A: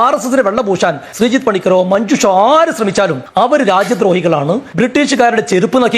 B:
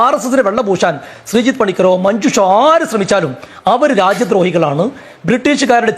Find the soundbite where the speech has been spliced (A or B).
A